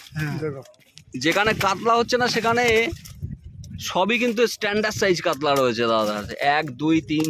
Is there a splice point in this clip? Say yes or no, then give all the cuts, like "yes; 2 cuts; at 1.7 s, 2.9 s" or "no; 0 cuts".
no; 0 cuts